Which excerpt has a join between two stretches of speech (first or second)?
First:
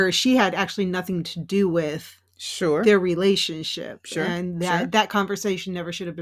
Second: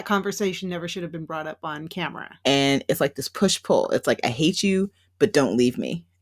second